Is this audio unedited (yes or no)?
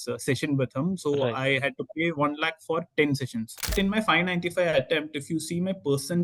no